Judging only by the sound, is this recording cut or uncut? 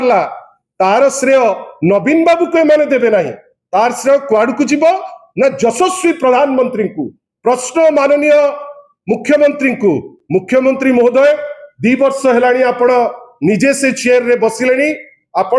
uncut